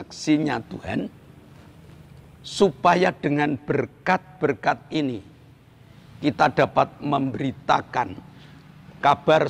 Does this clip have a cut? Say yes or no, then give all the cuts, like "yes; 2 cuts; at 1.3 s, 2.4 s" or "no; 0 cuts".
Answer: no; 0 cuts